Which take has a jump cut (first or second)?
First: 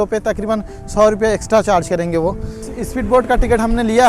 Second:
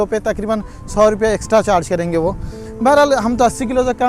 first